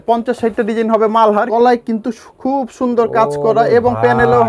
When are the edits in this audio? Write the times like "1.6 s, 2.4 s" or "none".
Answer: 1.5 s